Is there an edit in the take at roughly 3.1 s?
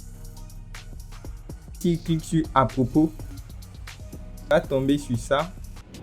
no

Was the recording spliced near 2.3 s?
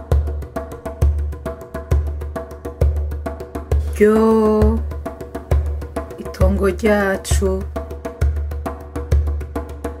no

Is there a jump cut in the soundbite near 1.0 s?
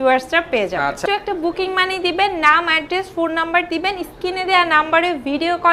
yes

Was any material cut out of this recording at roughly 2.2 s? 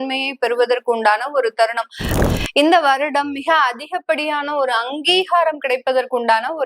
yes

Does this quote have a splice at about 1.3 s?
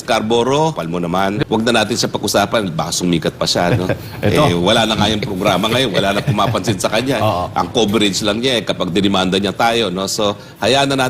yes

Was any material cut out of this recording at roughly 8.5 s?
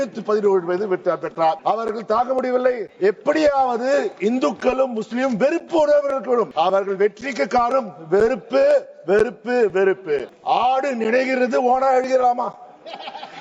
no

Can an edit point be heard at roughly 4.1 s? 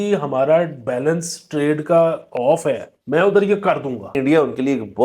yes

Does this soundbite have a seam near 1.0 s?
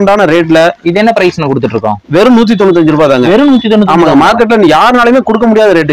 no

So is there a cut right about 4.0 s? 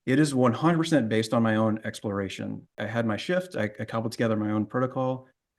no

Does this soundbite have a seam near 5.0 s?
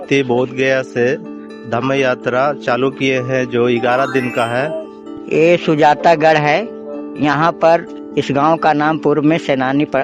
yes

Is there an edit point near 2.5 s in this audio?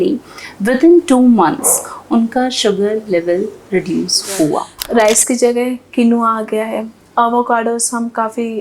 no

